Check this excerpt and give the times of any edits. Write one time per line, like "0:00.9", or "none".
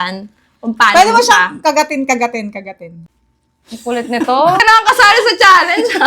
0:04.6